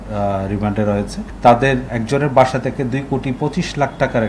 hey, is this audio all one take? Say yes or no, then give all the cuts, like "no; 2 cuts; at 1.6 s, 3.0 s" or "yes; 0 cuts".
no; 2 cuts; at 1.2 s, 1.9 s